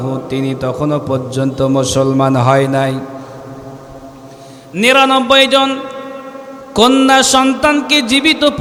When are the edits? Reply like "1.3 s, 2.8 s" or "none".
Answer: none